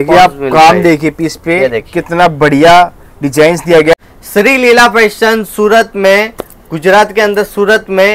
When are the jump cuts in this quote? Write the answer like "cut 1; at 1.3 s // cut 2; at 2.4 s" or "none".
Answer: cut 1; at 4.0 s